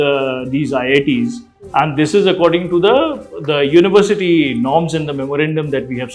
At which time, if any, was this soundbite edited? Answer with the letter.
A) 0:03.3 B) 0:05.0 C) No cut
C